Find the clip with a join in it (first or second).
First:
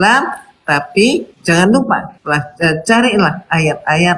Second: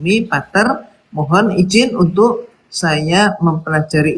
first